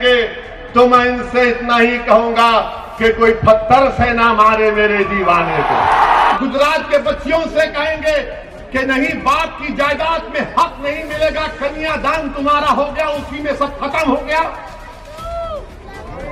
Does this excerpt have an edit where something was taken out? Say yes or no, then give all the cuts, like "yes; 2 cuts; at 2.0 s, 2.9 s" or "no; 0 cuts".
yes; 1 cut; at 6.3 s